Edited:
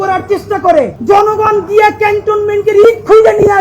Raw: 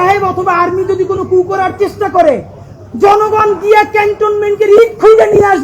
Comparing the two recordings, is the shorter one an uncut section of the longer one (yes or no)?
no